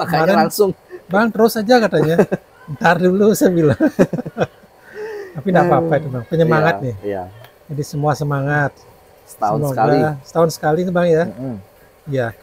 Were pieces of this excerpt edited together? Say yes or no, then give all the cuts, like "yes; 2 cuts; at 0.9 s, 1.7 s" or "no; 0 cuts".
no; 0 cuts